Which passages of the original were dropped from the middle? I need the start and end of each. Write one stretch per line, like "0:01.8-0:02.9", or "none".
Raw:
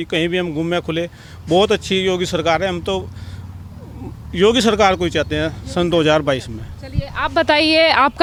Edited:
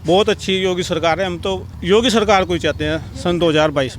0:03.1-0:04.2